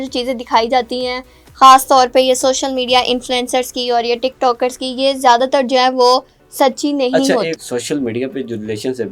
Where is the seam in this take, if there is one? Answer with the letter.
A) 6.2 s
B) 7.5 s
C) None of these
B